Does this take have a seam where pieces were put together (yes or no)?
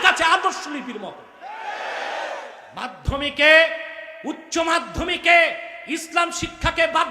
yes